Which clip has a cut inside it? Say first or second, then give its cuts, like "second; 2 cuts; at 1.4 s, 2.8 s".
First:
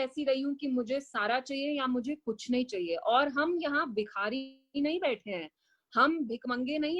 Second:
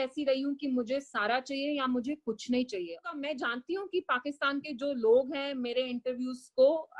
second; 1 cut; at 3.0 s